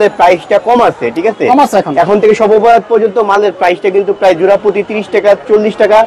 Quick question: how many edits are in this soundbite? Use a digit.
0